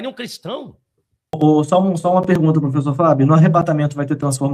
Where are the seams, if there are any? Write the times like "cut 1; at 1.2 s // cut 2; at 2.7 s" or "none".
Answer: cut 1; at 1.4 s